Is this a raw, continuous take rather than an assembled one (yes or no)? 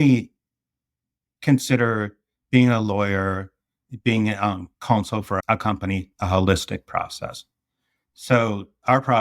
no